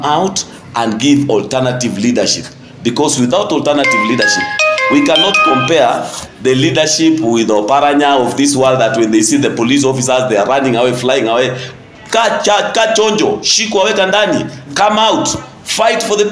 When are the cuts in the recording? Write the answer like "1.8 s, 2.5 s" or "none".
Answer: none